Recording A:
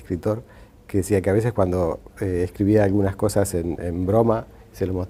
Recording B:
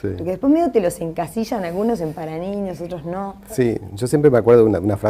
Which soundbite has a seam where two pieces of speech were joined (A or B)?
B